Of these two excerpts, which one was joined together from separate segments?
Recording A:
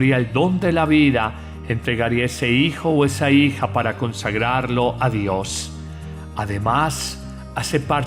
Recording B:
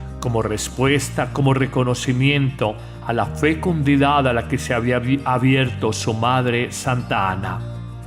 B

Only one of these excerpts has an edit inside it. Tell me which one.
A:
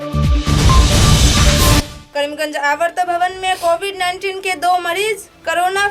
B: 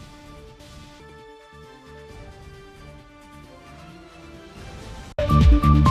A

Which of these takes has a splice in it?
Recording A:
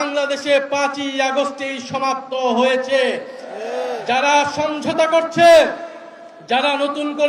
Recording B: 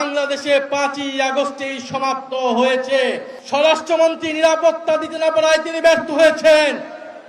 B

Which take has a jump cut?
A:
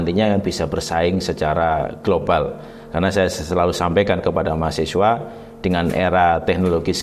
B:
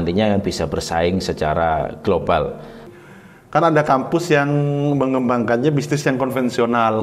B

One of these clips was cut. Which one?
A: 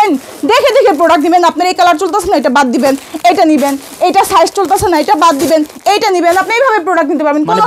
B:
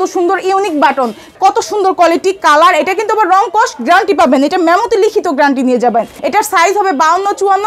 B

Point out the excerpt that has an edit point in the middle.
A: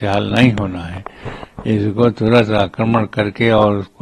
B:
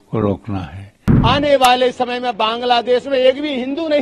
B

